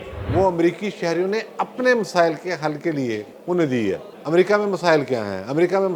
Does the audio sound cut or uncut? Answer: cut